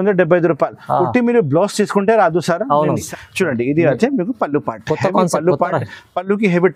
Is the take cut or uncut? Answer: cut